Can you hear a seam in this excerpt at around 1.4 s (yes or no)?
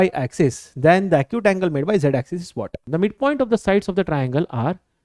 no